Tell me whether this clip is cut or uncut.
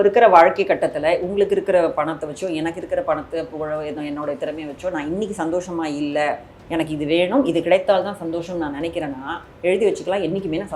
uncut